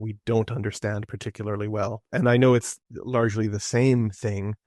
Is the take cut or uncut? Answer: cut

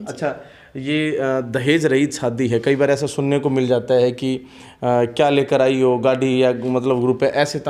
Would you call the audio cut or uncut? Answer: uncut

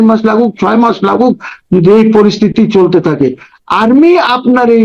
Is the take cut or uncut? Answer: uncut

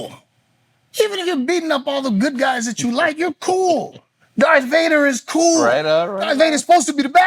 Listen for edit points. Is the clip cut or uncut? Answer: uncut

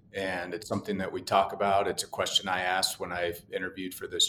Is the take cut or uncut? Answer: uncut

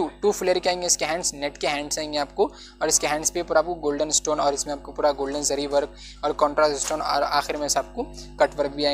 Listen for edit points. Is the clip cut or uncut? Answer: uncut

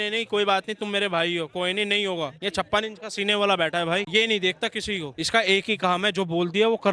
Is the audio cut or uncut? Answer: uncut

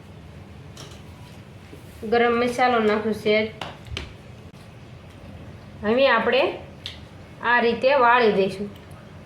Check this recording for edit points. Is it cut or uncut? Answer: cut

